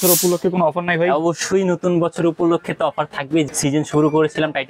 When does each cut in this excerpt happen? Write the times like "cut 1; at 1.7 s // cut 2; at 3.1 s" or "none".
cut 1; at 3.5 s